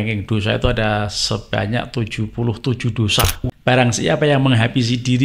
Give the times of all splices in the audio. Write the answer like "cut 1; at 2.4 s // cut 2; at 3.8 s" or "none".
cut 1; at 3.5 s